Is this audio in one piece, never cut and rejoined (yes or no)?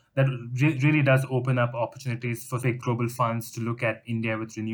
no